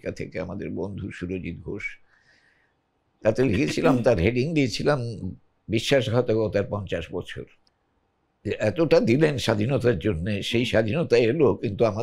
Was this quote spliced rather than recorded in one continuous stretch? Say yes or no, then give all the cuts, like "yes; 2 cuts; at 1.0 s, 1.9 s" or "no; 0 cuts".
yes; 1 cut; at 7.6 s